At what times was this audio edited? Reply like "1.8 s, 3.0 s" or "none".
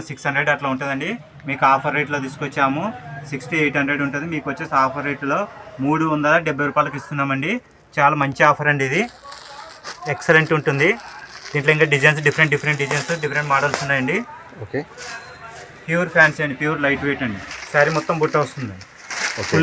17.5 s